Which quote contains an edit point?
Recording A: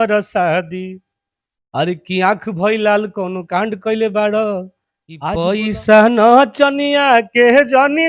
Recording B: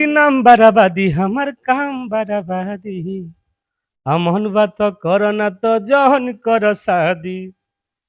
A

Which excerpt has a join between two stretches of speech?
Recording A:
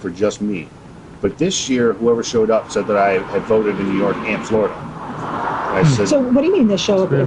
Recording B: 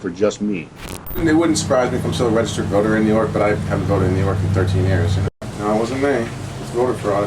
B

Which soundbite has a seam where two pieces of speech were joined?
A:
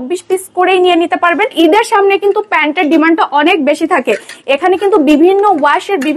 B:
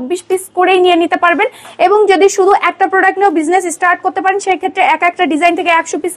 A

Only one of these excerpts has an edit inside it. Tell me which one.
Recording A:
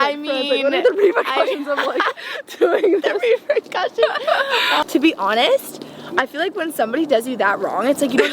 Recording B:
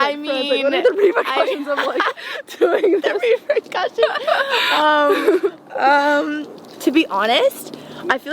A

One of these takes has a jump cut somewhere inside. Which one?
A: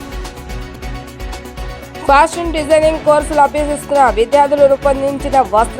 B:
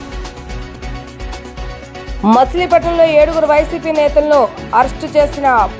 B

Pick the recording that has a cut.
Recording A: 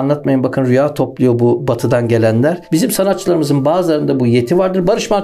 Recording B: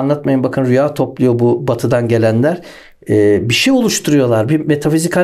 A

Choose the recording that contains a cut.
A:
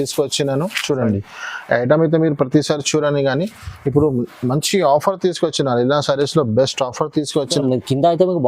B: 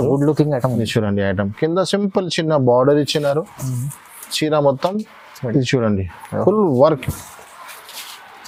A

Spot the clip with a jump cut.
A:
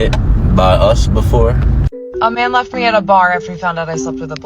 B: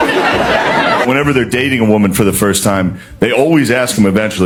A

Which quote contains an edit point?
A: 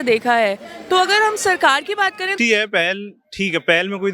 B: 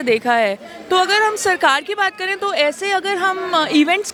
A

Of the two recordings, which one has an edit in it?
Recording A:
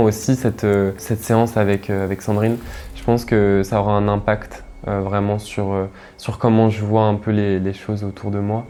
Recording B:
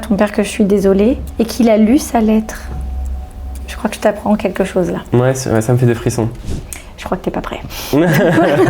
B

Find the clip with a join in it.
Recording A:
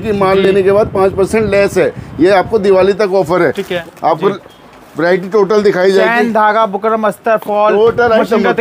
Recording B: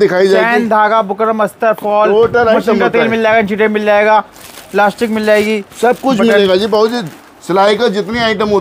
A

